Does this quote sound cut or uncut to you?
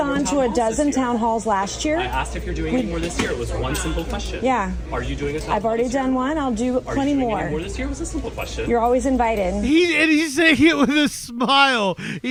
uncut